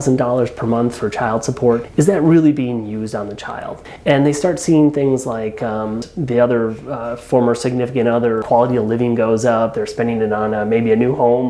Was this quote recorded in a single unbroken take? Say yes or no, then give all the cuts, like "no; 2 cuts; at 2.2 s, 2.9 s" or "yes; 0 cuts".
no; 4 cuts; at 1.9 s, 3.8 s, 6.0 s, 8.4 s